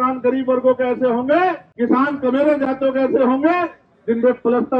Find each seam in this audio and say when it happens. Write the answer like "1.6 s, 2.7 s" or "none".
1.7 s